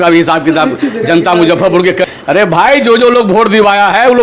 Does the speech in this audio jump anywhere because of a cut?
yes; 1 cut; at 2.0 s

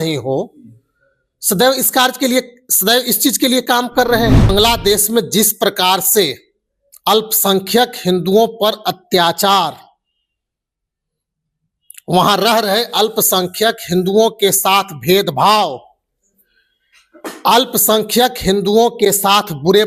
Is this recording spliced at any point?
yes; 1 cut; at 4.5 s

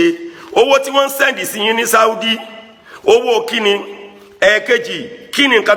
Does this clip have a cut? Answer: no; 0 cuts

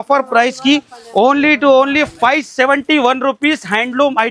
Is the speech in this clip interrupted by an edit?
no; 0 cuts

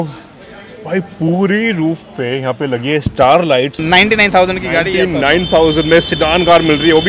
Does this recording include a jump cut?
yes; 1 cut; at 3.7 s

